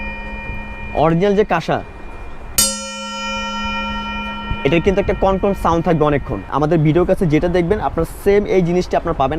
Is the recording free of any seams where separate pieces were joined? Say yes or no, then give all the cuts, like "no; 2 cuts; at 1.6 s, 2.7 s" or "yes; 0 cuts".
no; 1 cut; at 6.4 s